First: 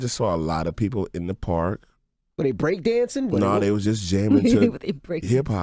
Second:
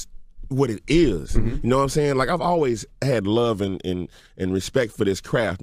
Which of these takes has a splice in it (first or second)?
second